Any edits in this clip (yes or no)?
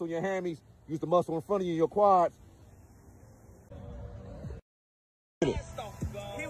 yes